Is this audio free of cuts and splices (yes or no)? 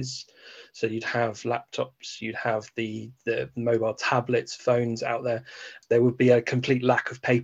no